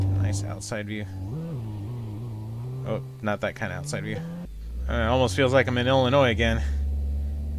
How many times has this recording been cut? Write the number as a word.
one